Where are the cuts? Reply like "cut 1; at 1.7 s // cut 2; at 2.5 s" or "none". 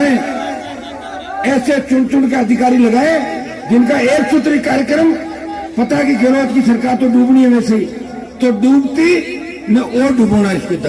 none

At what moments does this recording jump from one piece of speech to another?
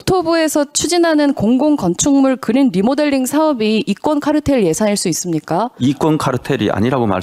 none

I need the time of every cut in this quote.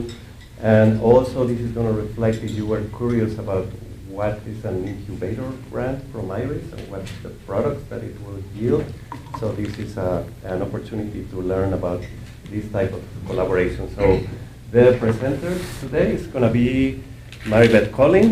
cut 1; at 14.6 s

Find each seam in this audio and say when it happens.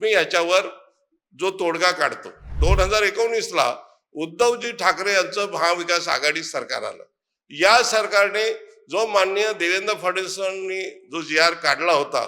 cut 1; at 2.5 s

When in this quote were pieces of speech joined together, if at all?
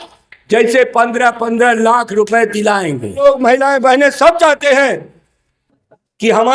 cut 1; at 3.2 s

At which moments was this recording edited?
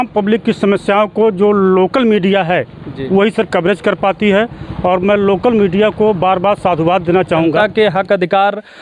cut 1; at 7.6 s

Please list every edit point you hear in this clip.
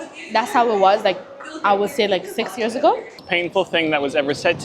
cut 1; at 3.3 s

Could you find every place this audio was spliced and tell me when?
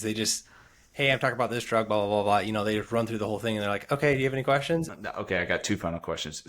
cut 1; at 4.9 s

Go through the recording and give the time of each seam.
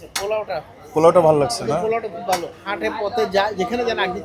cut 1; at 2.7 s

